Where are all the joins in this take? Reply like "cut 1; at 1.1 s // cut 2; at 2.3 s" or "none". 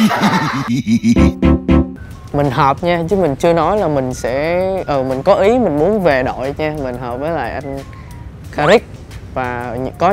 cut 1; at 1.9 s

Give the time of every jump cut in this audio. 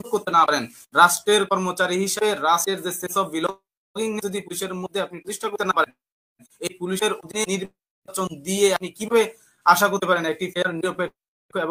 none

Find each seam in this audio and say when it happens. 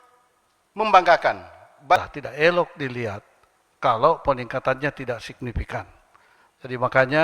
cut 1; at 2.0 s

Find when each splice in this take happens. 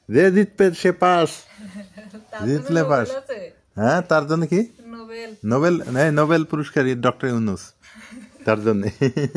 none

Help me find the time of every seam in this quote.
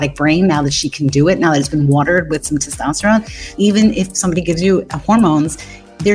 cut 1; at 3.4 s // cut 2; at 4.9 s

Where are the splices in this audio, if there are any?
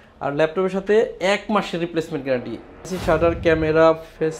cut 1; at 2.9 s

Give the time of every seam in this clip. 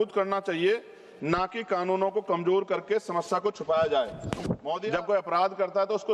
cut 1; at 4.8 s

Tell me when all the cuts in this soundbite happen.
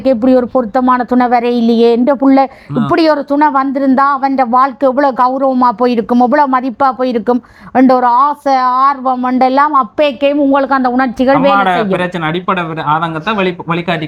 none

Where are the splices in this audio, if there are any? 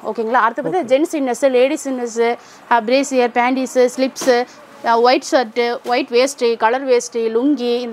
none

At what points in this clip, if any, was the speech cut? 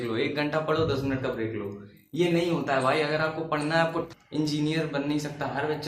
cut 1; at 4.1 s

